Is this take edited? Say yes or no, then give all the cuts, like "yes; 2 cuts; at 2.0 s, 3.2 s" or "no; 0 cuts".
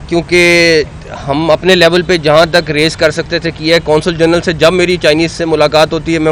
no; 0 cuts